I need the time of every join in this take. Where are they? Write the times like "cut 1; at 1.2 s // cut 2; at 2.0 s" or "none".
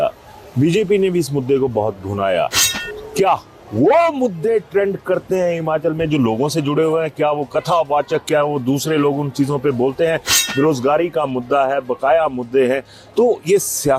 none